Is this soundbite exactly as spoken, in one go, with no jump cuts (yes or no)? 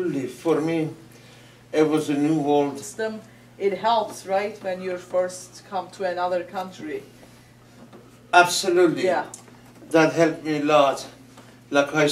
yes